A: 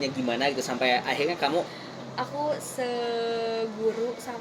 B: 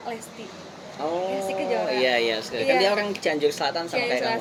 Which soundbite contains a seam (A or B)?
A